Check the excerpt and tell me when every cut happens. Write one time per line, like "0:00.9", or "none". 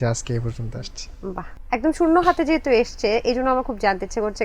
0:01.6

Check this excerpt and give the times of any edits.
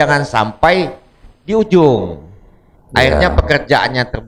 none

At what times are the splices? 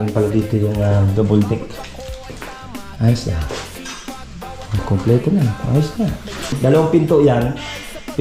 0:06.6

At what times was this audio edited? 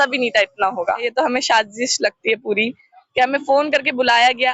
0:01.0

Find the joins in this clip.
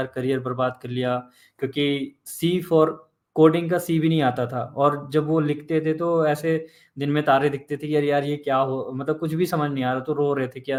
none

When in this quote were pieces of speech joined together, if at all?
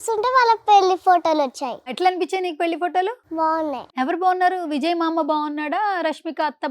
0:01.9
0:03.5

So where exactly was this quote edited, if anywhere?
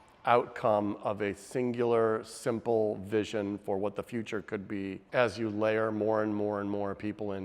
0:05.0

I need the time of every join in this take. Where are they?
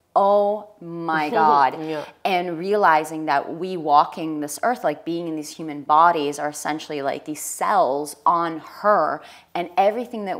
none

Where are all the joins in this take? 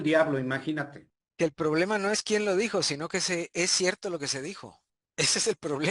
none

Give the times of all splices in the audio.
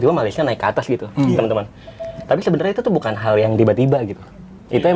none

